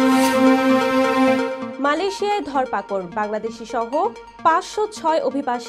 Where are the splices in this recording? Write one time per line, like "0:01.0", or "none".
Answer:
0:01.6